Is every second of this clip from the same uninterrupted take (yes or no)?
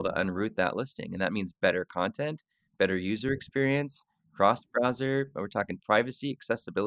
yes